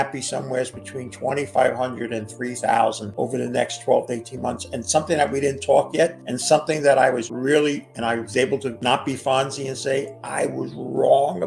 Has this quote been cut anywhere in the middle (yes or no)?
yes